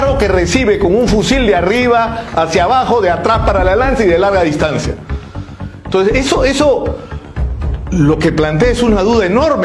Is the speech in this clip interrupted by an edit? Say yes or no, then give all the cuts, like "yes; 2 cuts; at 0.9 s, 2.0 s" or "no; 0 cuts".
no; 0 cuts